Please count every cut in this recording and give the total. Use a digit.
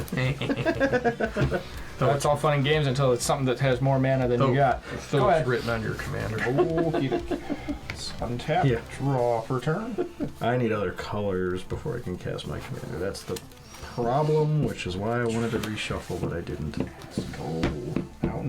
0